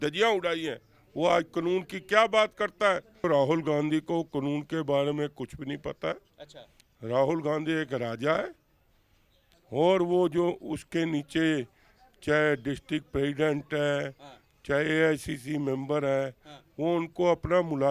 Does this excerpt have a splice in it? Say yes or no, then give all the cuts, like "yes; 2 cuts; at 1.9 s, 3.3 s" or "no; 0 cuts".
yes; 1 cut; at 3.2 s